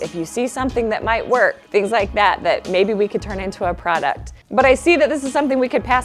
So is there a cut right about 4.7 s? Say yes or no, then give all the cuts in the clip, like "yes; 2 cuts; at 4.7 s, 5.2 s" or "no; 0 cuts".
no; 1 cut; at 1.6 s